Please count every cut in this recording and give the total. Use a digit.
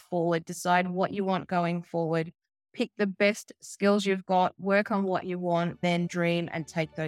1